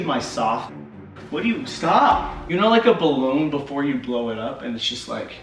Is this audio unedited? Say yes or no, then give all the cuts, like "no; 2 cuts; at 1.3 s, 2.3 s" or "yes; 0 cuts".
no; 2 cuts; at 1.1 s, 2.4 s